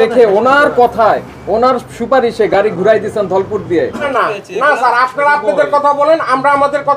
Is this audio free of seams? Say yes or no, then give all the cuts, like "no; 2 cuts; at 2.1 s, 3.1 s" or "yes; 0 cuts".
no; 1 cut; at 4.1 s